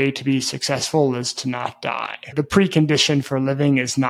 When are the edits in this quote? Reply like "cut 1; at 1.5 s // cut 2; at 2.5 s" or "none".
cut 1; at 2.3 s